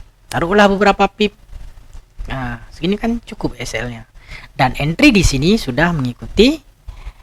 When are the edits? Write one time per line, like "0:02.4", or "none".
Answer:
none